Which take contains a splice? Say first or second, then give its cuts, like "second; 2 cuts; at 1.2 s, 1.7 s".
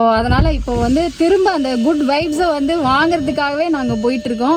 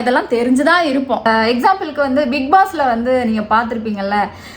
second; 1 cut; at 1.2 s